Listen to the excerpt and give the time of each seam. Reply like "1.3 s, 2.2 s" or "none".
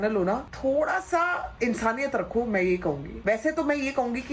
none